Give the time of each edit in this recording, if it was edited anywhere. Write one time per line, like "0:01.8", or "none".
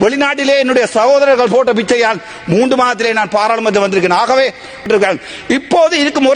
0:04.9